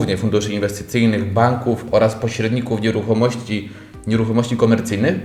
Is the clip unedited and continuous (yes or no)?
yes